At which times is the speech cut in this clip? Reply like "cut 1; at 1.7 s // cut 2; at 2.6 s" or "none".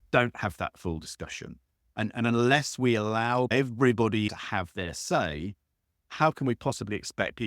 cut 1; at 3.5 s // cut 2; at 4.3 s